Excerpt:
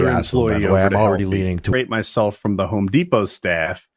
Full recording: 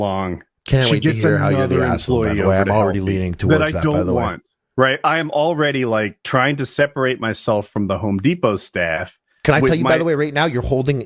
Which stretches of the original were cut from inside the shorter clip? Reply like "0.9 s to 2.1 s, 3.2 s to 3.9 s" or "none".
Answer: 3.5 s to 7.0 s